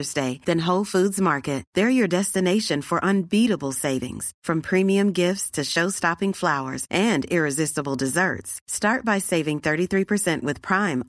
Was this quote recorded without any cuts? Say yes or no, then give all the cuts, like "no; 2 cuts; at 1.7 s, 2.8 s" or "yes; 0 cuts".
yes; 0 cuts